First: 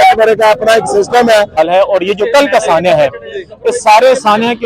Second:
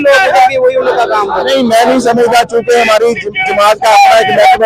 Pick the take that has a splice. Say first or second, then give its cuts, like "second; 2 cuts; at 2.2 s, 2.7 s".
first; 1 cut; at 1.6 s